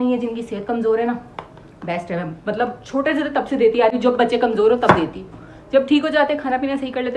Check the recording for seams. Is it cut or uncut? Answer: uncut